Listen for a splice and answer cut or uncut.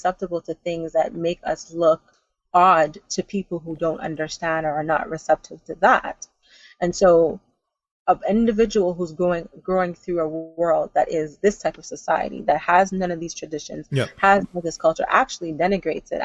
uncut